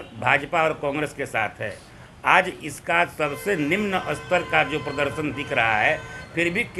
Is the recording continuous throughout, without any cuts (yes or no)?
yes